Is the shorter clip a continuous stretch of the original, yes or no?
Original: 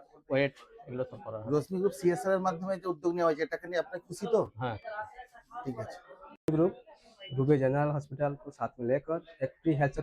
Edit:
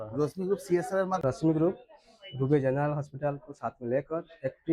no